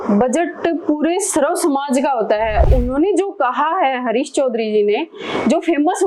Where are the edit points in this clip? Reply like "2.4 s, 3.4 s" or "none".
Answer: 2.6 s